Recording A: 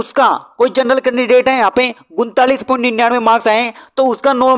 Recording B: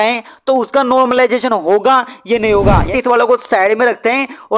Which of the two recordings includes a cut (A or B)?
B